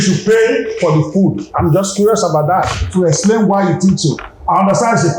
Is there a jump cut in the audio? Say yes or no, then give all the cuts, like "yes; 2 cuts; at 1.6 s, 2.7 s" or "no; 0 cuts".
no; 0 cuts